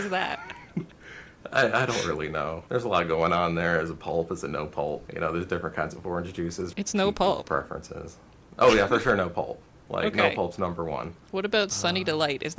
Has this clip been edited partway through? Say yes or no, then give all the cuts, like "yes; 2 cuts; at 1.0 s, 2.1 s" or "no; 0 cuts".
yes; 4 cuts; at 2.6 s, 5.1 s, 6.7 s, 11.2 s